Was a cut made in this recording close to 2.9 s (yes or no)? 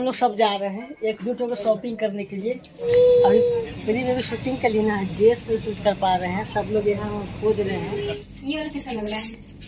yes